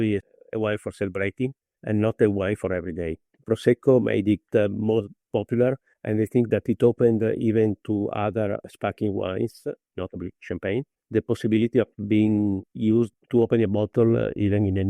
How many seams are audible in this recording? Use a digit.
2